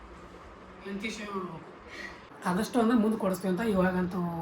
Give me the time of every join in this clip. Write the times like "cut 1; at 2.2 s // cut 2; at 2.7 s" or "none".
cut 1; at 2.2 s